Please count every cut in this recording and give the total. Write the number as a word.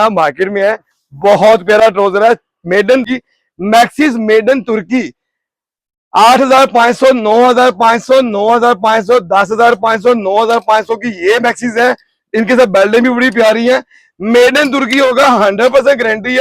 one